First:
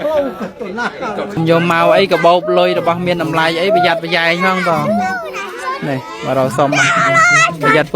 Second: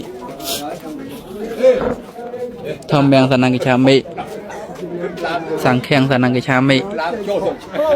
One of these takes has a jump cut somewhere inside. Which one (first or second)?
first